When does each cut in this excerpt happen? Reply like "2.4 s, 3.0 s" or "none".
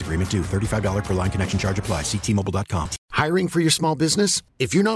3.0 s